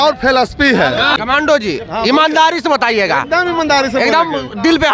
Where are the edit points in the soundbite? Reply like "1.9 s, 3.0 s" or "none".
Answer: 1.1 s